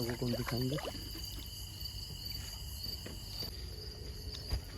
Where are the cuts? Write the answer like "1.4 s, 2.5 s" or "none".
3.5 s